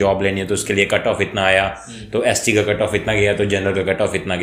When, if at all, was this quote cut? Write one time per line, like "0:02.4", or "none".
none